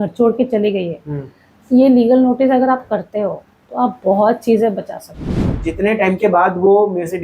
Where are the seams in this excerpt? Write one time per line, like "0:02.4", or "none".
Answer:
0:05.6